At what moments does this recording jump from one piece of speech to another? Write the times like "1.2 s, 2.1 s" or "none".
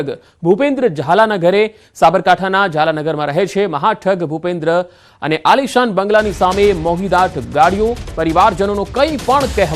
none